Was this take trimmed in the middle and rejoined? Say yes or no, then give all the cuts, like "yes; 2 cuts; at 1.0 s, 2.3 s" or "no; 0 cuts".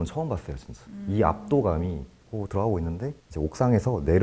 yes; 1 cut; at 2.2 s